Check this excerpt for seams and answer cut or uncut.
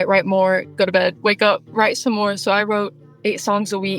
cut